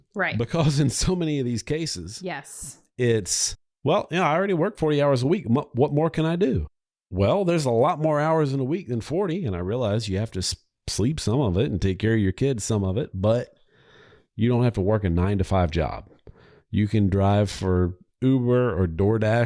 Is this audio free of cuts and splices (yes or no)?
yes